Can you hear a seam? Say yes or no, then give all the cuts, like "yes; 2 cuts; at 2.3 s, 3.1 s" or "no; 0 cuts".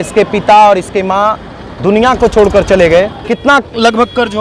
yes; 1 cut; at 3.2 s